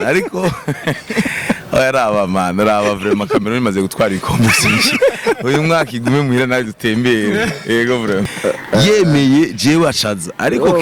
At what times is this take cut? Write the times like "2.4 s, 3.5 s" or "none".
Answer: 8.2 s